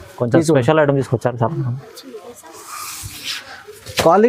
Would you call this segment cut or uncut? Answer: uncut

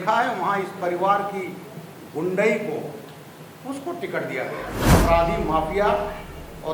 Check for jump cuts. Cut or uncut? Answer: cut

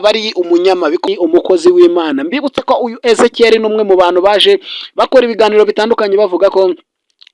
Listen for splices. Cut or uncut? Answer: cut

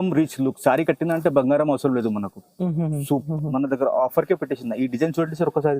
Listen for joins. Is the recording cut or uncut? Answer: cut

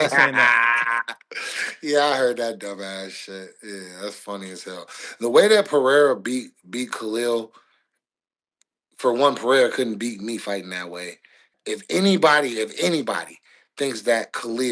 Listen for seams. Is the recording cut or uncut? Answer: cut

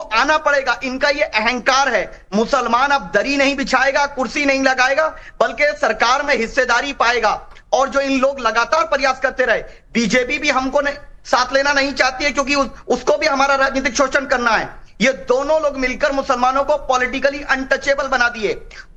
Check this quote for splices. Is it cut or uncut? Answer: uncut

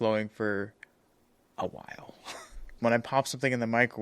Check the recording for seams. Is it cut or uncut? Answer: cut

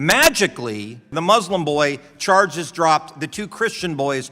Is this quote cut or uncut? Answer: cut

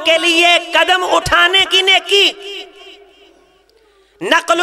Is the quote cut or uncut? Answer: uncut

